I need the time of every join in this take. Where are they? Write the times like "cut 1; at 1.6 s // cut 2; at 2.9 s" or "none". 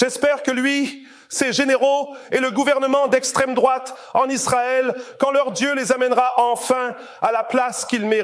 none

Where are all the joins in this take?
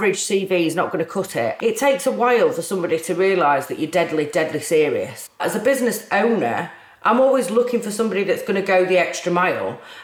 cut 1; at 1.5 s // cut 2; at 5.4 s

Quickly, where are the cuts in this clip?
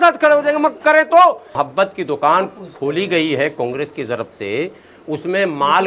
cut 1; at 1.6 s

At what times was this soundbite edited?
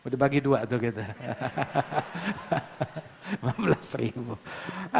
none

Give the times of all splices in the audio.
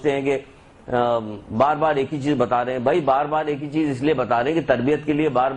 cut 1; at 3.7 s

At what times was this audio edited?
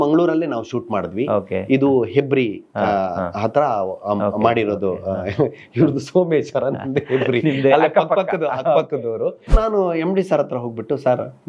cut 1; at 9.5 s

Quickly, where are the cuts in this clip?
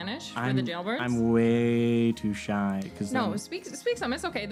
none

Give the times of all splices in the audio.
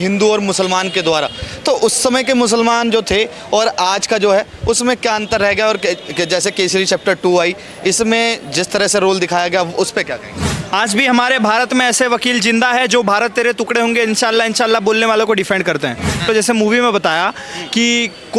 cut 1; at 10.6 s // cut 2; at 16.3 s

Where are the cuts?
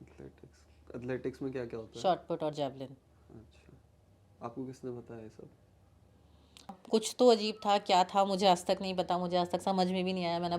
cut 1; at 6.8 s

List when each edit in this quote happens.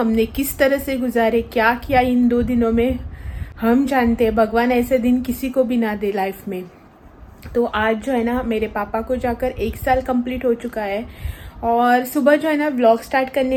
none

